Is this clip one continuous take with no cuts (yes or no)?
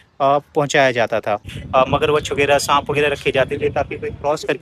no